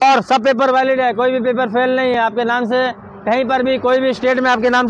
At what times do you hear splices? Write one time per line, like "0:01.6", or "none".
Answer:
none